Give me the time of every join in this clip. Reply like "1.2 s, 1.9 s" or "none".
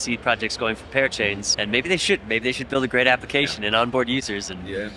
1.5 s